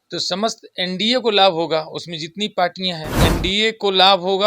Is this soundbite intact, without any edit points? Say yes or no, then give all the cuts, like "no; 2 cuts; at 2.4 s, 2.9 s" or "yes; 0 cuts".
no; 1 cut; at 3.2 s